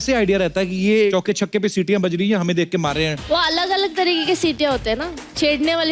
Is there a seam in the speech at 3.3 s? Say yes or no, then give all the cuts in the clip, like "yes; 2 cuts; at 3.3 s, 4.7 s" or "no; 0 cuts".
yes; 2 cuts; at 1.1 s, 3.3 s